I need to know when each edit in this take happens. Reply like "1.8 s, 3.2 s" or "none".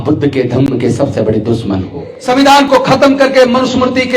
2.1 s